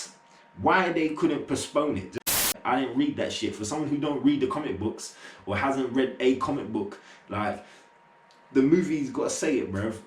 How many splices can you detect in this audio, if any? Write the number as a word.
one